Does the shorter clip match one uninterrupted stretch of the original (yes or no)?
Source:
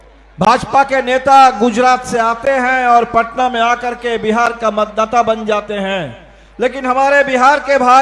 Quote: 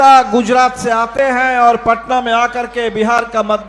yes